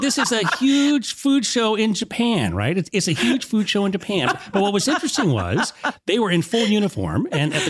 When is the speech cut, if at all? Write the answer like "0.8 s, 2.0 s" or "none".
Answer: none